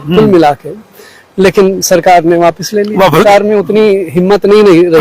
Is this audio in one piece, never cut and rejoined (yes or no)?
no